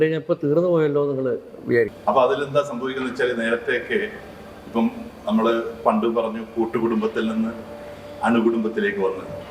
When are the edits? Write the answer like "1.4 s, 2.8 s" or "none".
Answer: 1.9 s